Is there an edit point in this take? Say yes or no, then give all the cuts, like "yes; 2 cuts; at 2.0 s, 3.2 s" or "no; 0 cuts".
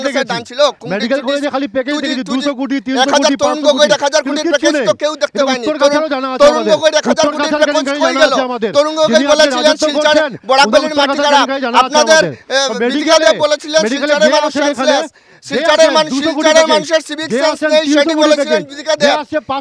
no; 0 cuts